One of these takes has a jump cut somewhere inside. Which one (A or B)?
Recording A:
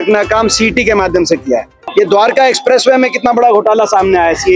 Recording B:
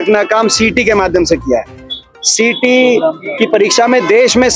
A